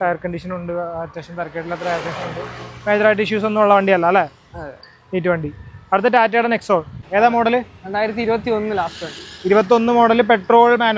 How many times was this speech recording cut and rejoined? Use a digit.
0